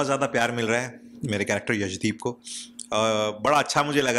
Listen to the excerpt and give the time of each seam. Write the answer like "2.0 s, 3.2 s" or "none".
none

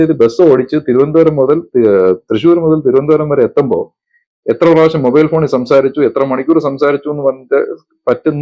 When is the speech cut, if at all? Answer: none

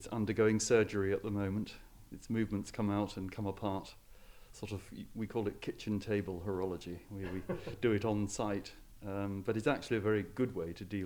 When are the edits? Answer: none

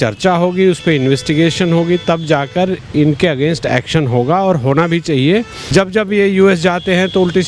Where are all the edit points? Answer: 5.6 s

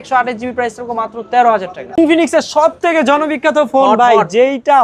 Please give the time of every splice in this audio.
2.0 s

